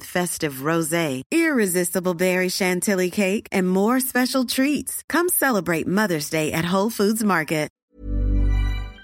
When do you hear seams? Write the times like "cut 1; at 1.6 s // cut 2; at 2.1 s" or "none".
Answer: cut 1; at 7.8 s